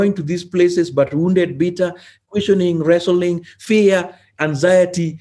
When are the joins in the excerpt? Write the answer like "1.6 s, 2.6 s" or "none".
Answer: none